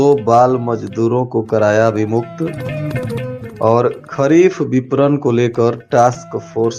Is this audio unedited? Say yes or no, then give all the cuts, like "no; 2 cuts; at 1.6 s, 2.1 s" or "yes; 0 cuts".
yes; 0 cuts